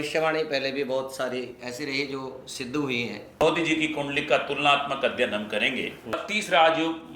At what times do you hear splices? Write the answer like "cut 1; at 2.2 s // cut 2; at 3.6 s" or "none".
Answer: cut 1; at 3.4 s // cut 2; at 6.2 s